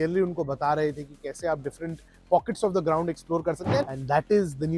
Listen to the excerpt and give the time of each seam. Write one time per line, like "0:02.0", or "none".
0:03.8